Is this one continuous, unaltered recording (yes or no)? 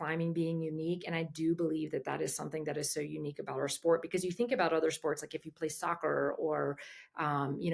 yes